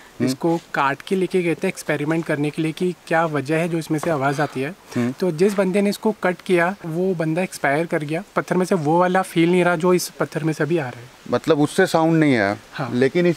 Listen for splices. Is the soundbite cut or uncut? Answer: cut